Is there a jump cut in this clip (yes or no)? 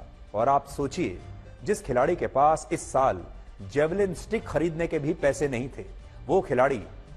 no